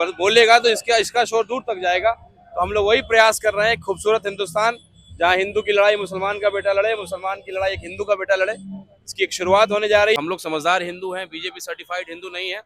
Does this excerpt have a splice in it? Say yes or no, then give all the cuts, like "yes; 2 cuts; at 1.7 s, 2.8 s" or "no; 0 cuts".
yes; 1 cut; at 10.2 s